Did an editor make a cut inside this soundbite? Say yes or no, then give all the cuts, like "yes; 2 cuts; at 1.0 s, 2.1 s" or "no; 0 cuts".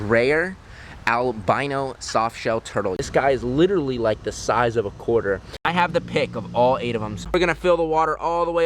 yes; 3 cuts; at 3.0 s, 5.9 s, 7.3 s